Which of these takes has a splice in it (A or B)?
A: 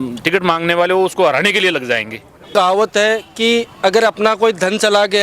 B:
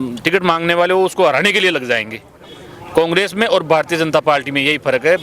A